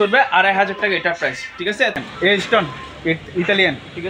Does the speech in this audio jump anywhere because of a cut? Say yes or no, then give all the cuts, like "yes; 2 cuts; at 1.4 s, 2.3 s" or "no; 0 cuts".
yes; 1 cut; at 1.9 s